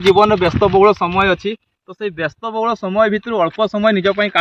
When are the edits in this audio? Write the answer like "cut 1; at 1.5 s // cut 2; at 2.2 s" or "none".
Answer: none